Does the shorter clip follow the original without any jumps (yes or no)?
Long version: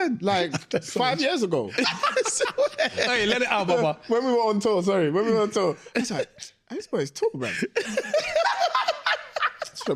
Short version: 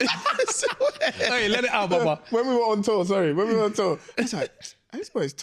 yes